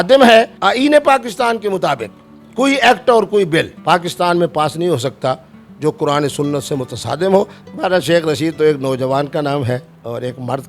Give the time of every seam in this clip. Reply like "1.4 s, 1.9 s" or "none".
7.6 s